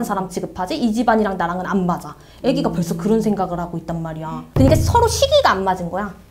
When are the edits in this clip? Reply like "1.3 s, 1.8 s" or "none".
4.4 s